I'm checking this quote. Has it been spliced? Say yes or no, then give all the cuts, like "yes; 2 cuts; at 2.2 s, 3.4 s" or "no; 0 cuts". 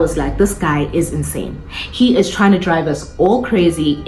no; 0 cuts